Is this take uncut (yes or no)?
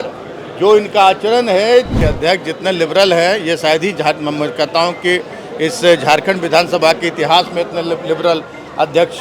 no